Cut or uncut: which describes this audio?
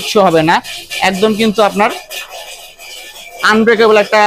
uncut